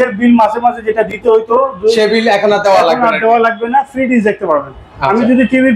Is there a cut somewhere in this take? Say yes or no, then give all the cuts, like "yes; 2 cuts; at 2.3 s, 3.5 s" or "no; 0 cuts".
no; 0 cuts